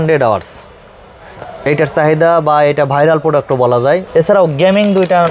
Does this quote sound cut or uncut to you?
cut